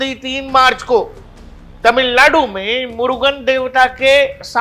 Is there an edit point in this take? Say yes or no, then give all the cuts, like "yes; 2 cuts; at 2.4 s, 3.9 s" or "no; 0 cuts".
no; 0 cuts